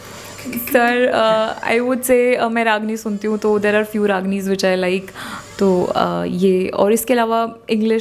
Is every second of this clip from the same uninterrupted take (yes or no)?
yes